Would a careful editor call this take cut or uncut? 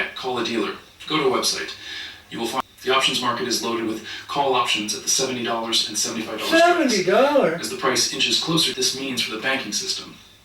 cut